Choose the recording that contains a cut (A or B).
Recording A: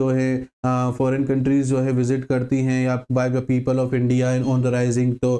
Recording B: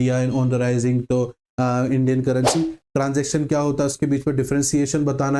B